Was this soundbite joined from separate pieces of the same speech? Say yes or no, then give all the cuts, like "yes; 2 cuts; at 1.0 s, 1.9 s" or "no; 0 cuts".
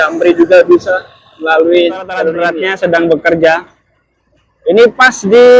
yes; 1 cut; at 2.5 s